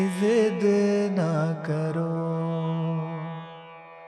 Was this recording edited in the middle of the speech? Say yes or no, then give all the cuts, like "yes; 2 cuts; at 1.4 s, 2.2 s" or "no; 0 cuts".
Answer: no; 0 cuts